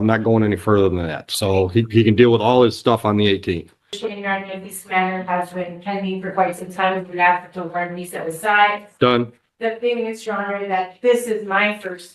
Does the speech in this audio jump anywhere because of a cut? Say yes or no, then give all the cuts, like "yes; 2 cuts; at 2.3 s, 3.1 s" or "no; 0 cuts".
yes; 1 cut; at 4.0 s